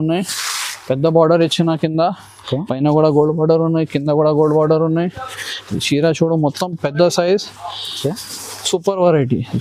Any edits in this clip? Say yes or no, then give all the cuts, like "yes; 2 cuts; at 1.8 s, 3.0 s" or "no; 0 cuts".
no; 0 cuts